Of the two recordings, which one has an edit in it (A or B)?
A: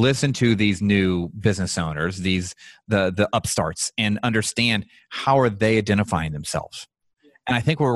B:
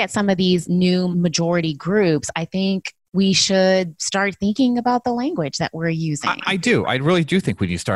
B